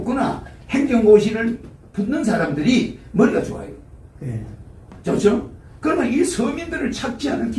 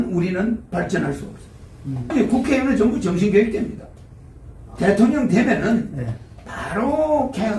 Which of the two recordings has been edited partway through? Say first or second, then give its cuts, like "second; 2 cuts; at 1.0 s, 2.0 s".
second; 1 cut; at 2.1 s